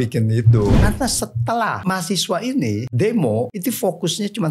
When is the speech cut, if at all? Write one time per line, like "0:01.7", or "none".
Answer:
0:00.7
0:01.8
0:02.9
0:03.5